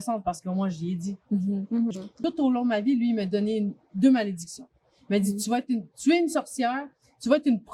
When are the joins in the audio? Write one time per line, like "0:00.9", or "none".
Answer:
0:02.2